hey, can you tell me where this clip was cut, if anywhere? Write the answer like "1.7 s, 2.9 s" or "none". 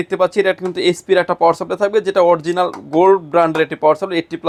none